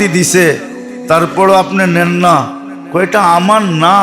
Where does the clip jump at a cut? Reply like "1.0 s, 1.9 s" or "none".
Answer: none